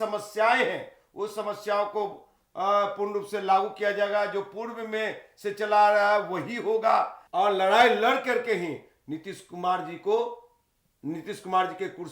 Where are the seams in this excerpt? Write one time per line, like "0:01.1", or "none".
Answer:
0:07.2